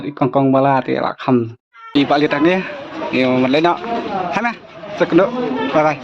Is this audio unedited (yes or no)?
no